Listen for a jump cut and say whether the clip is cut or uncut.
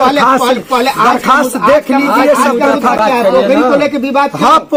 uncut